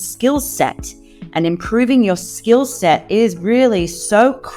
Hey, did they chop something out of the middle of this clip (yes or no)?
no